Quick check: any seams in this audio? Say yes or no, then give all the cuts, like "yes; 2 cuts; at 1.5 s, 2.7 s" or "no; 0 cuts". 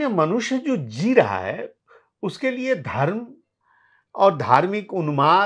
no; 0 cuts